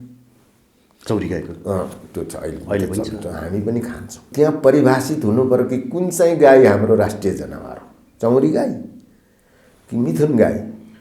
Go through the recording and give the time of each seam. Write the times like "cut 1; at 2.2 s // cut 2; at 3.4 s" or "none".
cut 1; at 4.3 s